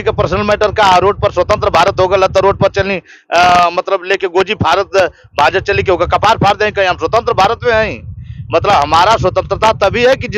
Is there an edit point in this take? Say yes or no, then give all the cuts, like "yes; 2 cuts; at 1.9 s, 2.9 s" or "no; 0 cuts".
no; 0 cuts